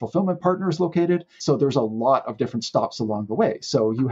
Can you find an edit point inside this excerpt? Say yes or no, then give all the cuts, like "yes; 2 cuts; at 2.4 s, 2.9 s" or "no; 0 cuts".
yes; 1 cut; at 1.3 s